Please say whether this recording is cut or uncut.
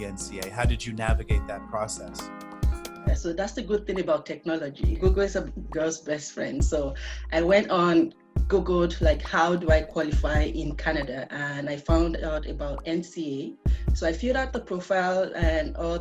uncut